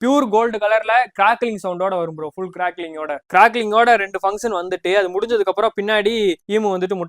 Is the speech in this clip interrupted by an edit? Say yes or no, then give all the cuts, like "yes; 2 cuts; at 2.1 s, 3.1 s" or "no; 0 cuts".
yes; 1 cut; at 3.2 s